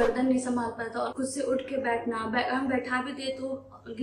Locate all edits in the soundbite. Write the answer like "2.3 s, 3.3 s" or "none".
1.1 s